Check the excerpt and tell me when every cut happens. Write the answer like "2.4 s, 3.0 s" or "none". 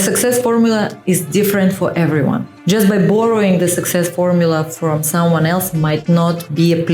2.5 s